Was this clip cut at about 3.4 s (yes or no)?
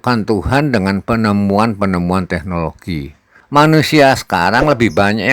yes